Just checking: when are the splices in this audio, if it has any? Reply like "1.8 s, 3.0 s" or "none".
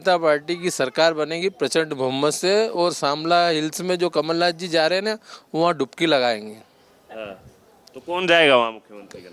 none